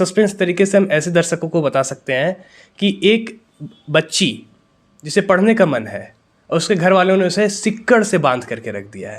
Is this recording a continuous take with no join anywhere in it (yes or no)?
yes